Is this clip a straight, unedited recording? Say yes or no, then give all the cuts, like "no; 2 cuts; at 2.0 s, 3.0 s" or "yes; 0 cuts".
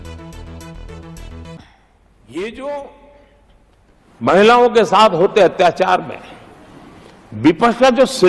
no; 1 cut; at 1.6 s